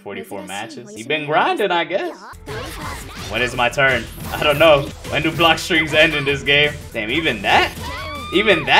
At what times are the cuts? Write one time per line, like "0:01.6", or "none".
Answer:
0:02.3
0:05.0
0:06.8